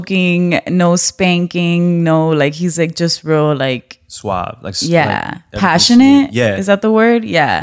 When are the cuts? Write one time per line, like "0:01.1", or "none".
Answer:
none